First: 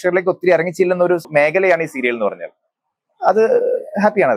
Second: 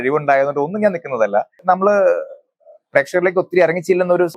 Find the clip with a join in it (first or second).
second